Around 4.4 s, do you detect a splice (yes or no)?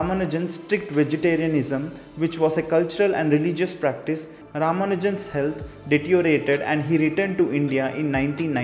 yes